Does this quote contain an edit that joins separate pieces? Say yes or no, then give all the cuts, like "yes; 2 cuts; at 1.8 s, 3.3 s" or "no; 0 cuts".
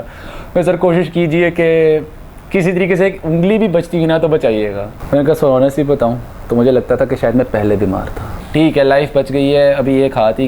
yes; 2 cuts; at 4.9 s, 8.3 s